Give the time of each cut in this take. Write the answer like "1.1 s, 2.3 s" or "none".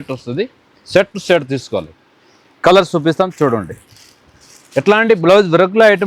none